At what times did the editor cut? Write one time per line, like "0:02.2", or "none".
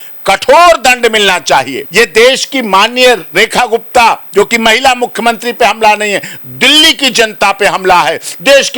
0:01.8